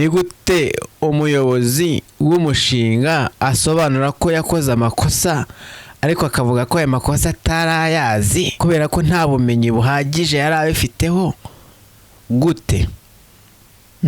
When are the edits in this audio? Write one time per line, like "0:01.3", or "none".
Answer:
0:00.9
0:02.1
0:08.5